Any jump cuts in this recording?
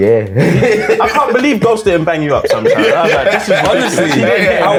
no; 0 cuts

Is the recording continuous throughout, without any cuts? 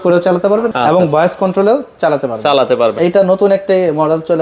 no; 1 cut; at 3.0 s

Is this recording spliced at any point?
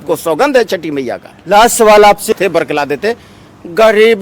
yes; 1 cut; at 2.3 s

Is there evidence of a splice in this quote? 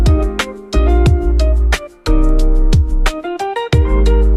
no; 0 cuts

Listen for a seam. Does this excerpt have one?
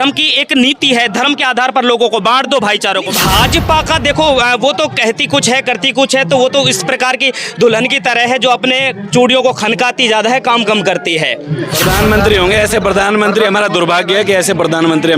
yes; 2 cuts; at 3.1 s, 11.8 s

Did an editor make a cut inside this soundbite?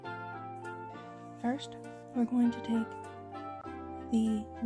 yes; 1 cut; at 1.0 s

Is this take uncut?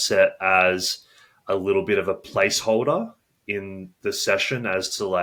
yes; 0 cuts

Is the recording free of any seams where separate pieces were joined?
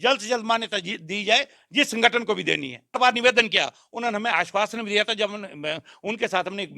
no; 1 cut; at 3.0 s

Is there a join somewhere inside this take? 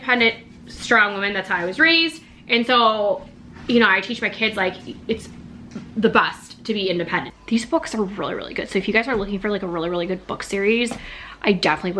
yes; 1 cut; at 7.3 s

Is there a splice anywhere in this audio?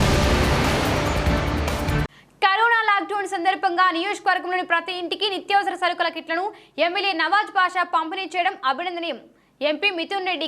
yes; 1 cut; at 2.0 s

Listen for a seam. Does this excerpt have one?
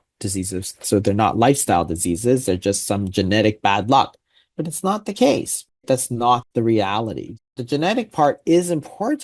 yes; 1 cut; at 7.6 s

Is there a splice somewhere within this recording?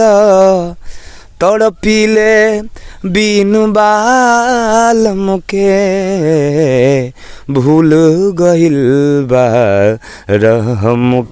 no; 0 cuts

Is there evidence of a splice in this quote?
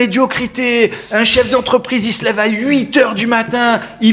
no; 0 cuts

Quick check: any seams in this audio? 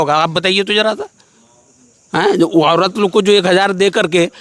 no; 0 cuts

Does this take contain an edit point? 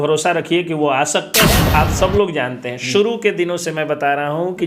yes; 1 cut; at 1.7 s

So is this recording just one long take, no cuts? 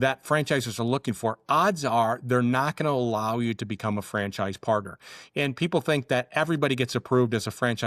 yes; 0 cuts

